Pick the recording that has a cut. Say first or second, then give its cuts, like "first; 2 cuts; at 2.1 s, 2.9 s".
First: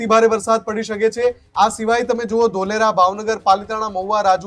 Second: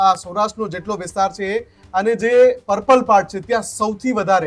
first; 1 cut; at 1.4 s